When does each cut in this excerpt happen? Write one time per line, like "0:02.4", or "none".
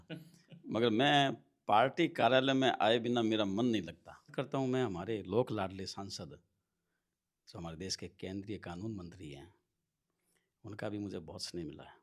0:04.3